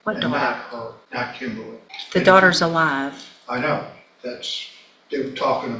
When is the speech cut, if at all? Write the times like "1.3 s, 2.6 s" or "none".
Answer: 1.0 s, 1.9 s